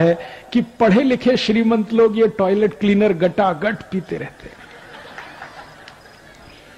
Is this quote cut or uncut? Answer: uncut